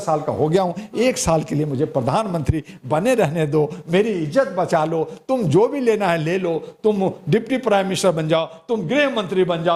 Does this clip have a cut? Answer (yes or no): no